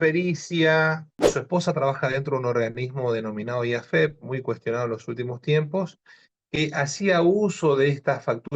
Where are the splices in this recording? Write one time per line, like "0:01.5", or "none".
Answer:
0:01.2

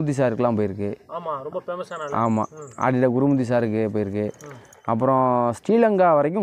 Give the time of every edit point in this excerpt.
none

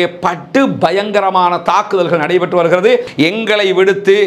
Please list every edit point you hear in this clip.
0:03.1

